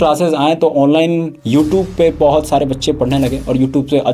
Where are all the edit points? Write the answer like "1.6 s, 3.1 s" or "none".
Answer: none